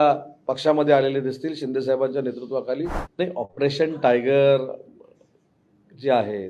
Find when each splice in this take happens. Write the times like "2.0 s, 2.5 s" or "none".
3.0 s